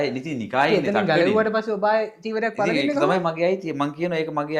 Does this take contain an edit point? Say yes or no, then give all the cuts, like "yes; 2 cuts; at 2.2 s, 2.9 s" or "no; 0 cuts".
no; 0 cuts